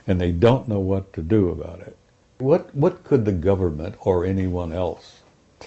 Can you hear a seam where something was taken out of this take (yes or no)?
yes